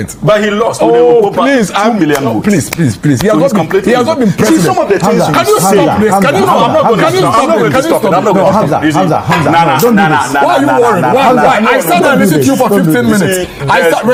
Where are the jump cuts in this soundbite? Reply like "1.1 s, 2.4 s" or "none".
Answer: none